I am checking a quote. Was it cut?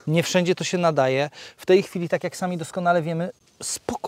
no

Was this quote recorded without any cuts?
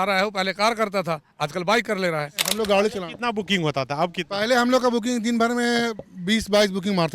no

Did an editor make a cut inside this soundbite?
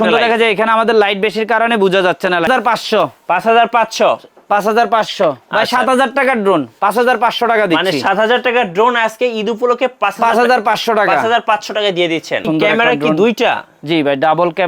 yes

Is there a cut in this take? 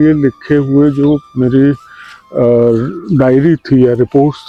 no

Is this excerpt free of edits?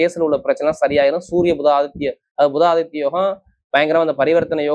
yes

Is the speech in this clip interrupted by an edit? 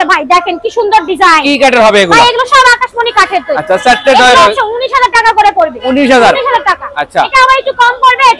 no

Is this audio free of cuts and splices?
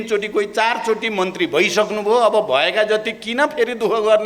yes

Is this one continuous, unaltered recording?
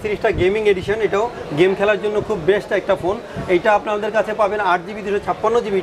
yes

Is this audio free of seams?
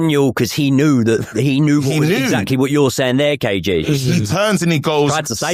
yes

